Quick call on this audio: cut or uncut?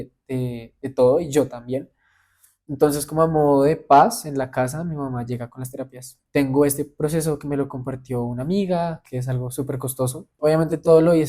cut